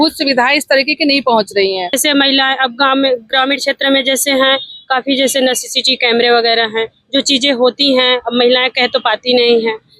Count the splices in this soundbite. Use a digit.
1